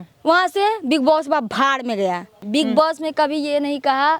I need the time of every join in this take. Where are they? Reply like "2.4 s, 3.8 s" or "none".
2.4 s